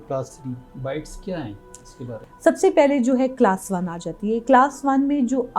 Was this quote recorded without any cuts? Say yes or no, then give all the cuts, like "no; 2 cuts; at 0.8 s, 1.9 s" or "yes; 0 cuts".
no; 1 cut; at 2.2 s